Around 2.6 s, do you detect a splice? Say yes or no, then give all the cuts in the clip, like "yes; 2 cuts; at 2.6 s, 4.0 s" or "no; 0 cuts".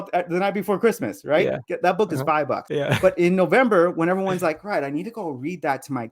yes; 1 cut; at 2.6 s